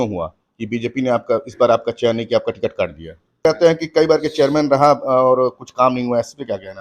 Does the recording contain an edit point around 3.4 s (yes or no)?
yes